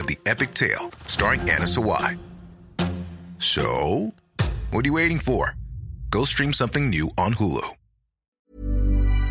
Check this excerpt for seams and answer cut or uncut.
cut